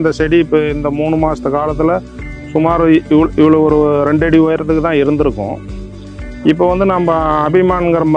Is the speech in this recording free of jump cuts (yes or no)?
yes